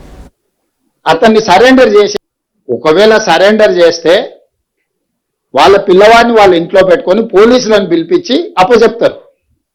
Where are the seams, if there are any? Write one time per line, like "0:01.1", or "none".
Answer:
0:02.1